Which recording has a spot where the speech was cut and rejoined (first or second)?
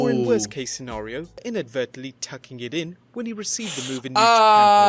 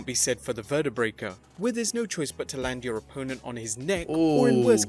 first